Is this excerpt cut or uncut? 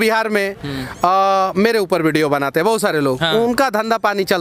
uncut